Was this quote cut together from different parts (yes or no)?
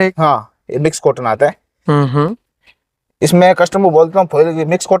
no